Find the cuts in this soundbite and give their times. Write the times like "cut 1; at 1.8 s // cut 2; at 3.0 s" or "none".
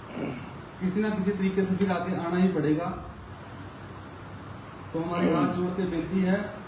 none